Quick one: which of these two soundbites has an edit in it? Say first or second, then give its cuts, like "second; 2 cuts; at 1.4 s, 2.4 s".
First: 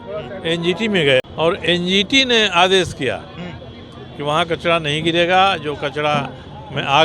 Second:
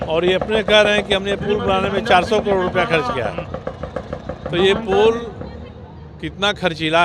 first; 1 cut; at 1.3 s